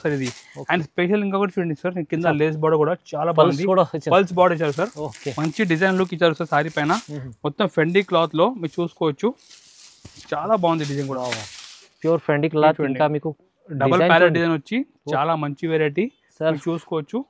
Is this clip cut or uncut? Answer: uncut